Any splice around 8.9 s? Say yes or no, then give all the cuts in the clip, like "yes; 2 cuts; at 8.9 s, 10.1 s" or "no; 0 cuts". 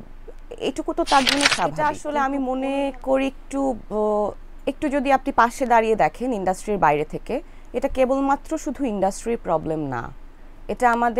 no; 1 cut; at 1.8 s